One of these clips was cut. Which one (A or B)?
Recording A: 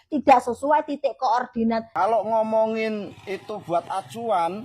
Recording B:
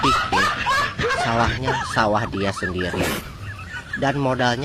A